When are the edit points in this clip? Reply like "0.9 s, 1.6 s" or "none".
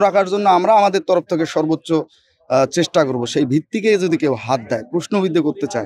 none